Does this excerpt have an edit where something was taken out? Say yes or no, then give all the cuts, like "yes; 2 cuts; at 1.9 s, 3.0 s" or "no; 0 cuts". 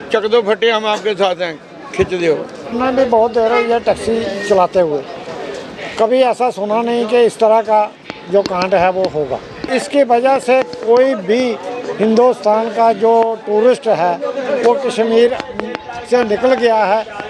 yes; 2 cuts; at 2.8 s, 9.6 s